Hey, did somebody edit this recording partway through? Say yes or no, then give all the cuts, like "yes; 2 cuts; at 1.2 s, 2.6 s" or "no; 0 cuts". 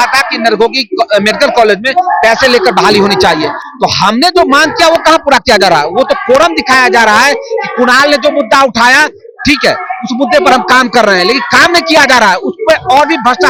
no; 0 cuts